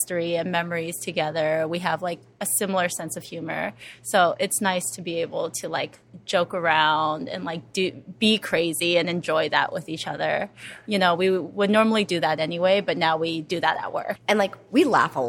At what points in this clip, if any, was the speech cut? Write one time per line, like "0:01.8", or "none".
0:14.2